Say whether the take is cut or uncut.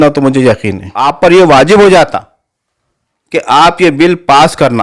cut